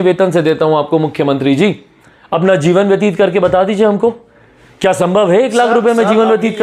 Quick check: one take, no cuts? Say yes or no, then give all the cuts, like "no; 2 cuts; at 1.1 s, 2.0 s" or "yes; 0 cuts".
yes; 0 cuts